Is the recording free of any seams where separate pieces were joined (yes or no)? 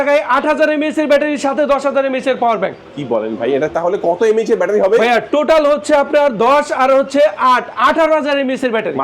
yes